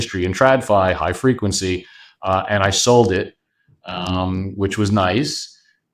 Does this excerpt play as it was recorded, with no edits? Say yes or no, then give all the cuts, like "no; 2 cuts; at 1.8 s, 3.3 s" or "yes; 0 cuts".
yes; 0 cuts